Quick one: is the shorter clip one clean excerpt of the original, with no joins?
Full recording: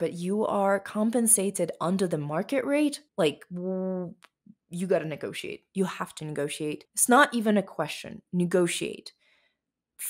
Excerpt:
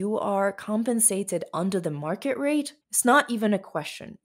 no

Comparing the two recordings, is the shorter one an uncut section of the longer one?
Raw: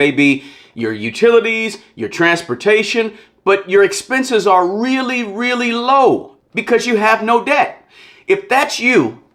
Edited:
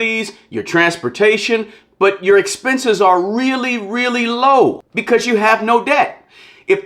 no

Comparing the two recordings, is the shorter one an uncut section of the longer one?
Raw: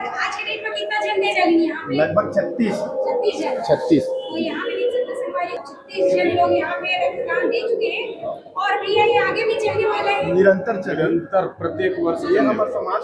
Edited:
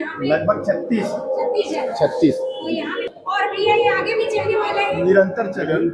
no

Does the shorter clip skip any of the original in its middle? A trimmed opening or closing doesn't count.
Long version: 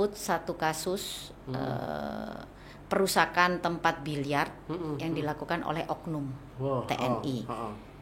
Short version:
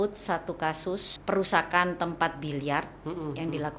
yes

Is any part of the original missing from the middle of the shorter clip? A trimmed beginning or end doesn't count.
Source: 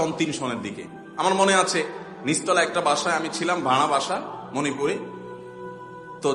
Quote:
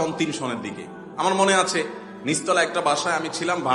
no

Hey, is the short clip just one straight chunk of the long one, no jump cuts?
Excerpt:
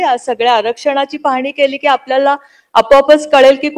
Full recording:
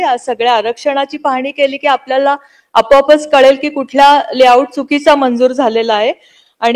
yes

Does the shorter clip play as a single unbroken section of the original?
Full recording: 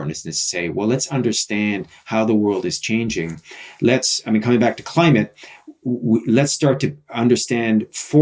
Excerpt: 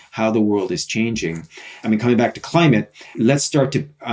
no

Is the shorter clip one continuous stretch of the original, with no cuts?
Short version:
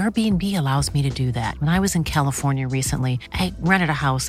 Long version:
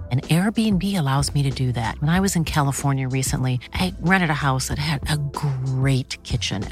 yes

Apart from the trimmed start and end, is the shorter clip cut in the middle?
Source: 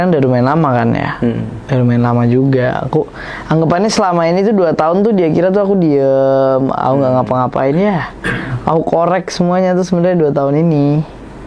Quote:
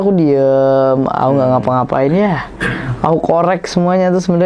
no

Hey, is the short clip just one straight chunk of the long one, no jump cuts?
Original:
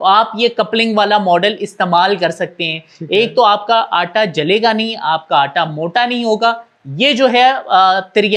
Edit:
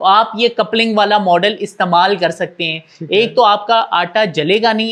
yes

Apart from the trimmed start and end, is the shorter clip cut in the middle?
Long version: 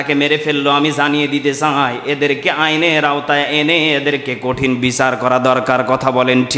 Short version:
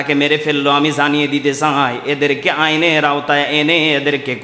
no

